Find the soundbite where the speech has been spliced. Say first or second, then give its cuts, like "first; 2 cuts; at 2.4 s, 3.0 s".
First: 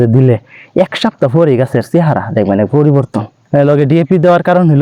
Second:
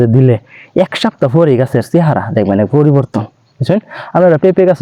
first; 1 cut; at 3.4 s